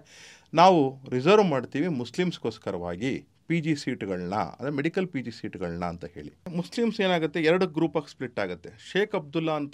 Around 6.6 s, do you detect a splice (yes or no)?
yes